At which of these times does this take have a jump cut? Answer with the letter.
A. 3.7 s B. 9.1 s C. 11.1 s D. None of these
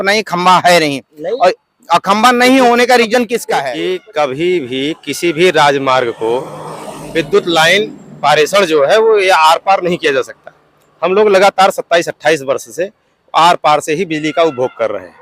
A